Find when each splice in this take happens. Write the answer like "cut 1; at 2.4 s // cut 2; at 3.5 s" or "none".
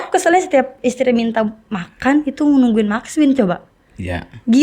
none